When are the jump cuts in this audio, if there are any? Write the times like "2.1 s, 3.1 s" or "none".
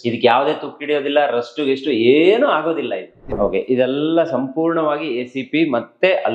3.2 s